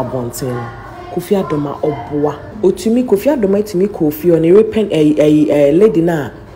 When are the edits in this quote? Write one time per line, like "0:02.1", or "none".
0:02.5